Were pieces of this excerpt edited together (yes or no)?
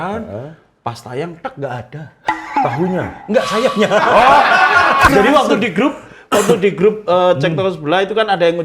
yes